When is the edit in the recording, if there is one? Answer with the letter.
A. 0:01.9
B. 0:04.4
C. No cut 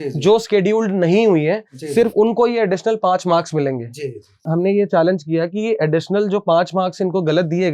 B